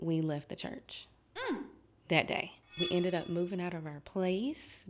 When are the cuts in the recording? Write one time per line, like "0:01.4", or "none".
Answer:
0:02.7